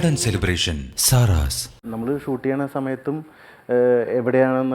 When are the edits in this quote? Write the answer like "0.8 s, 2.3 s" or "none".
1.8 s

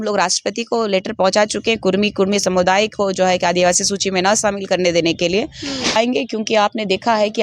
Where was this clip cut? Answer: 6.0 s

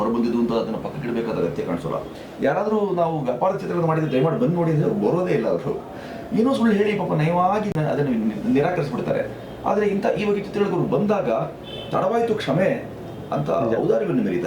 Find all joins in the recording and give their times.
2.2 s

